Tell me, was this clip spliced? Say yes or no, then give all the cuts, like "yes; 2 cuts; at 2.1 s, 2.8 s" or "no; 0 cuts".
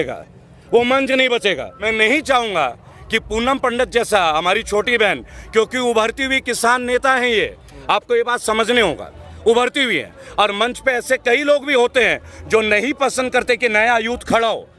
yes; 1 cut; at 1.7 s